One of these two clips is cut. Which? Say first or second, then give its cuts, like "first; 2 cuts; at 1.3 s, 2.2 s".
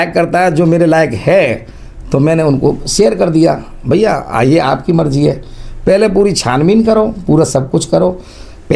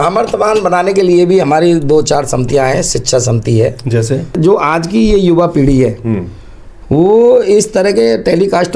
second; 1 cut; at 4.4 s